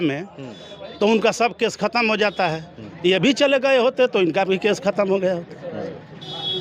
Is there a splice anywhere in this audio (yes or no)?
no